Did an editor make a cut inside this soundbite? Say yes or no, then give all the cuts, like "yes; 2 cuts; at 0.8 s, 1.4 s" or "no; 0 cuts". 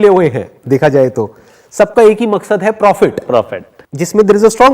yes; 1 cut; at 3.3 s